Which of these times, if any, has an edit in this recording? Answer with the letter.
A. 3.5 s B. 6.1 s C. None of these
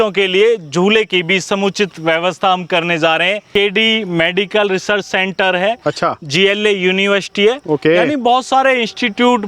A